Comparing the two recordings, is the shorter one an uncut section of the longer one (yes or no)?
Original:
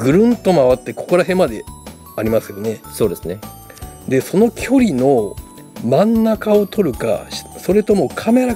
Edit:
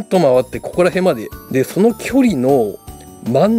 no